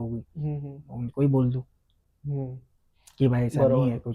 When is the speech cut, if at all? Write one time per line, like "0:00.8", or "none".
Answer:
none